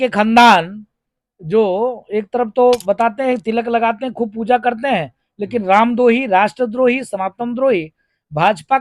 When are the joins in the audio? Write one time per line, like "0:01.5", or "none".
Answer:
none

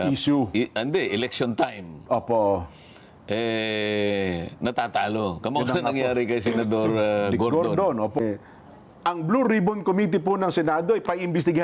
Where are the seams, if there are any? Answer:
0:08.2

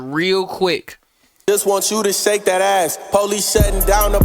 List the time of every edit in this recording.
0:01.3

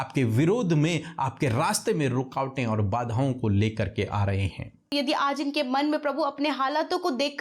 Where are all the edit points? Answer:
0:04.9

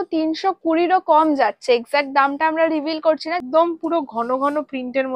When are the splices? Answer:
0:03.4

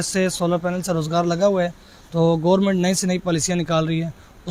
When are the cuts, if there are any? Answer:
none

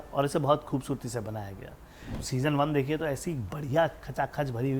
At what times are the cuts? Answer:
0:02.1

